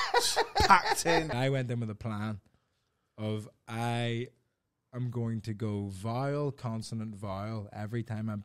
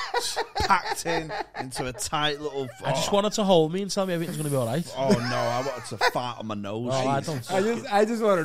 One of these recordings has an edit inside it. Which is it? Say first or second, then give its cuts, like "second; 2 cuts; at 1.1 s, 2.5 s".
first; 1 cut; at 1.3 s